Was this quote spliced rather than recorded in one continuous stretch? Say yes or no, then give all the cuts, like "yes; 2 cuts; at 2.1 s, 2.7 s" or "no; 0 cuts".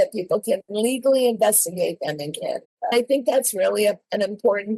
yes; 1 cut; at 2.8 s